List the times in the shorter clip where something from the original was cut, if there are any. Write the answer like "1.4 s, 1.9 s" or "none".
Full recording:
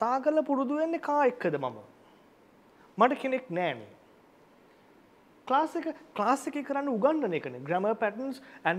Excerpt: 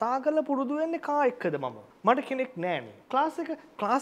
1.9 s, 2.9 s